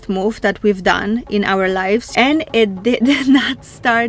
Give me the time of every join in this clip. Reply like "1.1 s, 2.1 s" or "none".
2.1 s